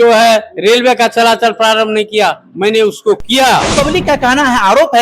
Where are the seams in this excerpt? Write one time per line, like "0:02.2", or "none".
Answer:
0:03.7